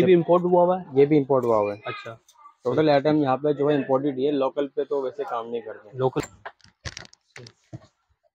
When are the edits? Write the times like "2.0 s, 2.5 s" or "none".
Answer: 6.2 s